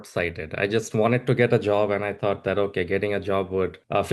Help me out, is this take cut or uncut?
uncut